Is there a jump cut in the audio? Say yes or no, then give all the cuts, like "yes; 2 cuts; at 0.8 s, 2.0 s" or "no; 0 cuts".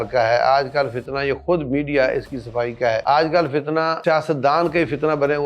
yes; 2 cuts; at 3.0 s, 4.0 s